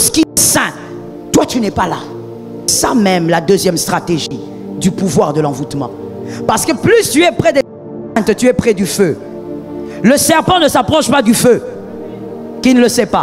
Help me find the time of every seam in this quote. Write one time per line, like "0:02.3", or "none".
none